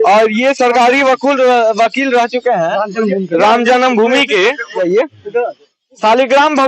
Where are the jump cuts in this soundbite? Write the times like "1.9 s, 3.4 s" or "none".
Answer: 4.8 s